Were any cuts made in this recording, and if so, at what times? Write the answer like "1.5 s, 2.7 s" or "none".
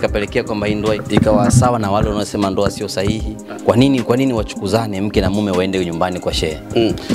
1.0 s